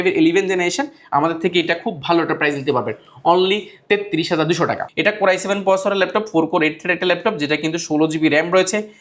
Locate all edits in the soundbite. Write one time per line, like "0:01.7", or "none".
0:04.8